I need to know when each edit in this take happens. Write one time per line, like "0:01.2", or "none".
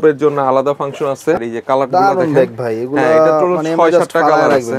0:01.4